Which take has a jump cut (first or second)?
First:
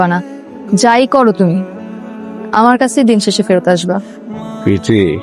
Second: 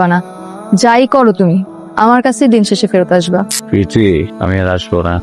second